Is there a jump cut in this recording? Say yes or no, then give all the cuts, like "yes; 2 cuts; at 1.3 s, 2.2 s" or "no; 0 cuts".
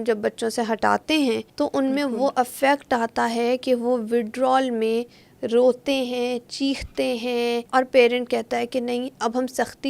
yes; 2 cuts; at 1.5 s, 7.6 s